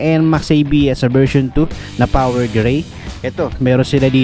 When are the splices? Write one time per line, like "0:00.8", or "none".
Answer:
none